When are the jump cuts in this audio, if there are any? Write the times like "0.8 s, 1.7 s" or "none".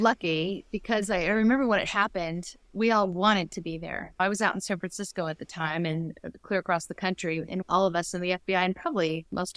2.6 s, 4.2 s, 7.5 s